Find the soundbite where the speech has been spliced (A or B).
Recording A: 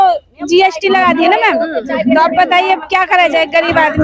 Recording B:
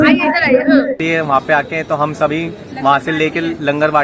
B